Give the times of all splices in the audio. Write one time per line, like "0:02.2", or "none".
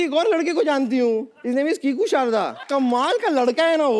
0:01.3
0:02.6

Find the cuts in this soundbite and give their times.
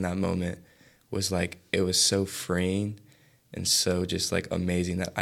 none

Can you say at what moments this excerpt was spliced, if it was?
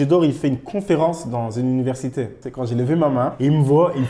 0:02.4

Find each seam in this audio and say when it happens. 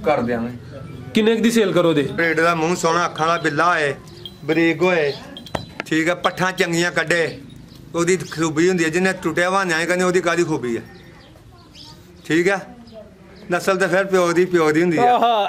0:02.2

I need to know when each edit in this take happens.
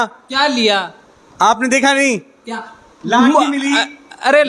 none

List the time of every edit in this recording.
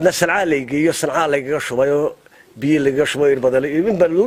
none

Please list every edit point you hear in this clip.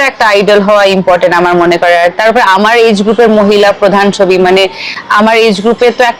none

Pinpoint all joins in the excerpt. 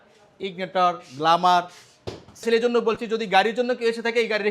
0:02.4

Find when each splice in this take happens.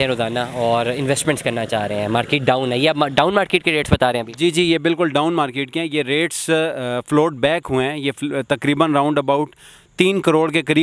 none

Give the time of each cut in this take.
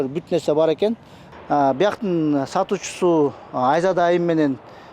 none

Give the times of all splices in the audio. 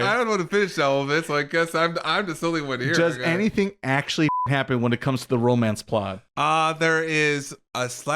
0:04.4
0:06.2

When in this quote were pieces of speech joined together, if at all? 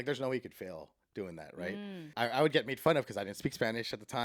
0:02.1

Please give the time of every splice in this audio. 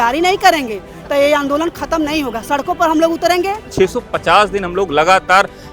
0:03.6

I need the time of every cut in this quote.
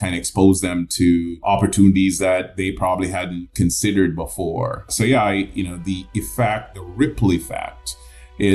0:01.4
0:04.9

